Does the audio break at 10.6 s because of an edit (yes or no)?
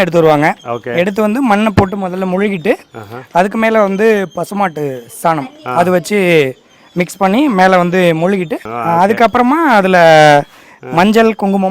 no